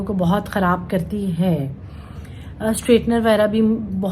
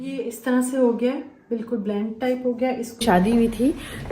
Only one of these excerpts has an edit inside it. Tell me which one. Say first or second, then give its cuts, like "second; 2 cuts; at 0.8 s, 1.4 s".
second; 1 cut; at 3.0 s